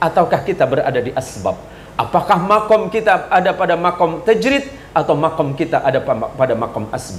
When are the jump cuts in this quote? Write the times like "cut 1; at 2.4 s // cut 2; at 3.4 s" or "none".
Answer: none